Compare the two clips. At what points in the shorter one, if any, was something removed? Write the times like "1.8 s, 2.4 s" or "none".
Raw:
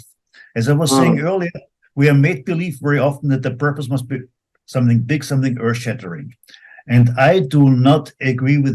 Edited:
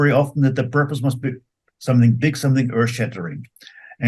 none